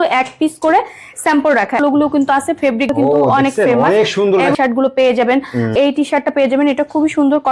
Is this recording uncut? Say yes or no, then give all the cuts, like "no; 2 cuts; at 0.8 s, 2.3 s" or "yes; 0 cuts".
no; 4 cuts; at 1.8 s, 2.9 s, 4.5 s, 5.7 s